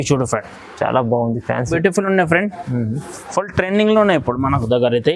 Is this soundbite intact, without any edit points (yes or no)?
no